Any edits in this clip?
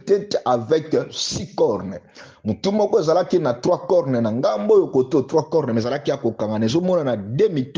no; 0 cuts

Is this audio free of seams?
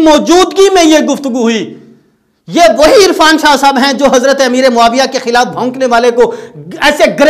yes; 0 cuts

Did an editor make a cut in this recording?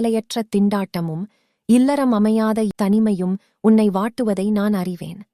yes; 1 cut; at 2.7 s

